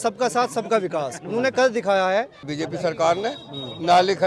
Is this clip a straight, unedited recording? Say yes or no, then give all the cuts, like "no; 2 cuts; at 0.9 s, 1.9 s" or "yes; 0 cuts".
no; 1 cut; at 2.5 s